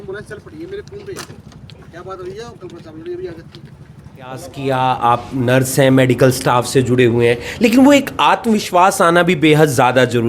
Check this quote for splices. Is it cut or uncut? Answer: cut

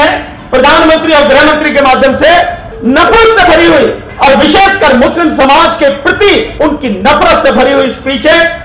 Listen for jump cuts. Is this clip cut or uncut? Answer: cut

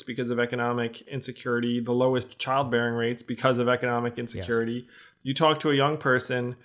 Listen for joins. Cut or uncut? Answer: uncut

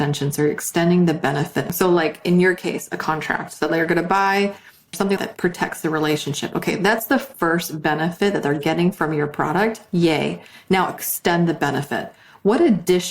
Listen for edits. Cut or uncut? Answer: cut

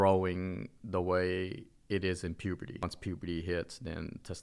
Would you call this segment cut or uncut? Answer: cut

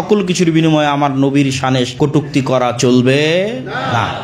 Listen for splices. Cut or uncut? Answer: cut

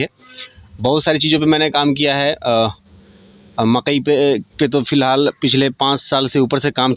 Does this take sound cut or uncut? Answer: uncut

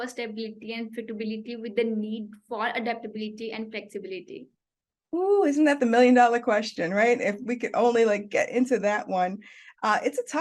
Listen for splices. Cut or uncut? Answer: uncut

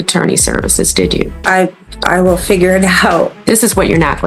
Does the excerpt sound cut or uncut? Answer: cut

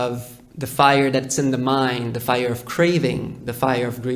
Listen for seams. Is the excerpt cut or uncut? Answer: uncut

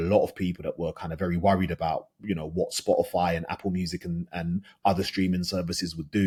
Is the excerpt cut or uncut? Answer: uncut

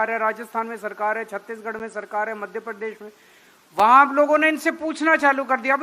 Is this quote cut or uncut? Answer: uncut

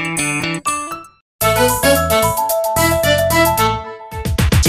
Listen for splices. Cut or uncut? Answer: cut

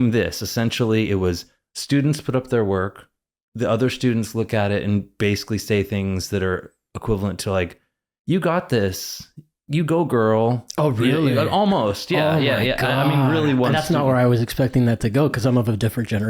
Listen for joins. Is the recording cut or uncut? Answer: uncut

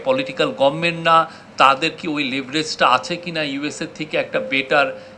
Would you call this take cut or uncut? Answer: uncut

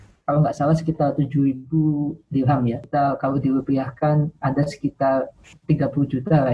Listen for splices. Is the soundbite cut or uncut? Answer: cut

